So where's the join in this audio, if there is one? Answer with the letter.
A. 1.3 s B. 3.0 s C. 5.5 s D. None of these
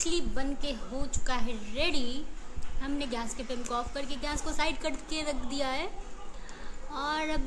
D